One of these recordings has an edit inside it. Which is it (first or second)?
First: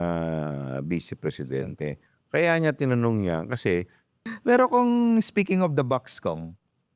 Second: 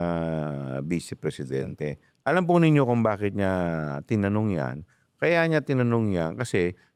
first